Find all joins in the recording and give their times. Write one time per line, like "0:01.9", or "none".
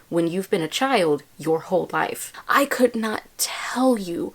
0:02.3